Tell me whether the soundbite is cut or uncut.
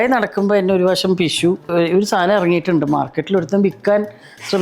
cut